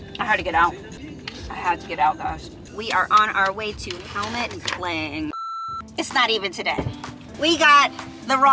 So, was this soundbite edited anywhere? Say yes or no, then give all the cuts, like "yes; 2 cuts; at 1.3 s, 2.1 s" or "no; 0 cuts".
yes; 2 cuts; at 2.7 s, 5.9 s